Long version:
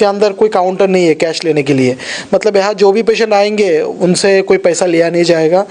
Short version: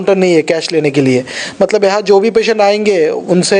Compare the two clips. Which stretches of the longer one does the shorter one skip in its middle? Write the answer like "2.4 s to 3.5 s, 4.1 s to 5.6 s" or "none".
none